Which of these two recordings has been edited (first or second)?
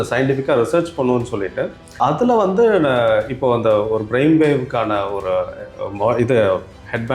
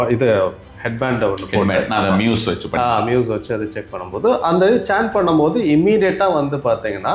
first